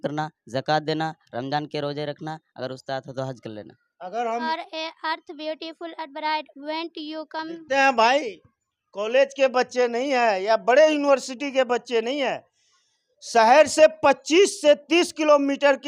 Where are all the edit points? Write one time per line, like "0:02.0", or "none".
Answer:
0:04.5